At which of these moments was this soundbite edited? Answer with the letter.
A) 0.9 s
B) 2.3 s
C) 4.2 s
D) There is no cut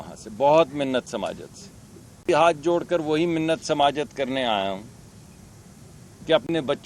B